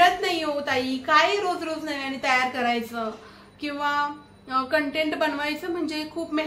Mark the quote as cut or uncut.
uncut